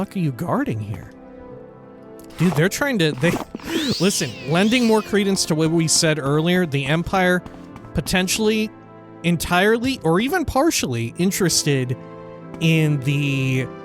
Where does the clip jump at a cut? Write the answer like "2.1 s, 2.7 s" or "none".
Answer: 1.0 s